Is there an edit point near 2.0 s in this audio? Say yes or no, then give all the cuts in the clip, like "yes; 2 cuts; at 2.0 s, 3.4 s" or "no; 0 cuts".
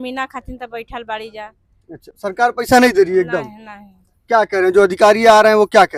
no; 0 cuts